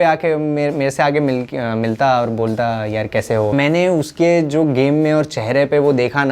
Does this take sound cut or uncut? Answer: cut